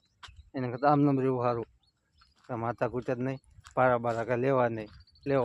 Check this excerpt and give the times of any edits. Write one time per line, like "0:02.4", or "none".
0:02.3